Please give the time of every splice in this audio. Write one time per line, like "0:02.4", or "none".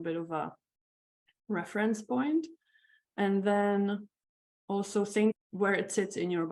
0:05.3